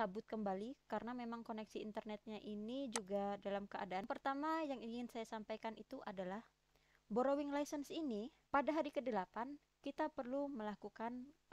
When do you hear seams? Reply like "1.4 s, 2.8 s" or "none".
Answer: 4.0 s, 8.3 s